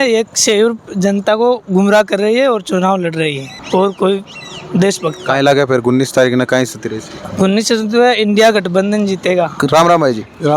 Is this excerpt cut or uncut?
uncut